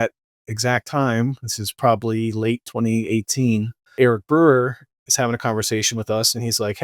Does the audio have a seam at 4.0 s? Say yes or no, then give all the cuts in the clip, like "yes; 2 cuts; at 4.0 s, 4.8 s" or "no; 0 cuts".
yes; 1 cut; at 4.0 s